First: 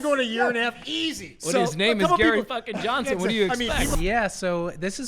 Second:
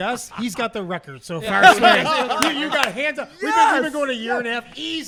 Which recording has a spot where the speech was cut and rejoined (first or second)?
first